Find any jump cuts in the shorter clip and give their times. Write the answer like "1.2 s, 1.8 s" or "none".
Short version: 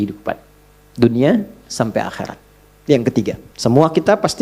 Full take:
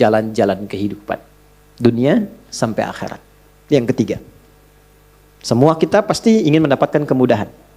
3.5 s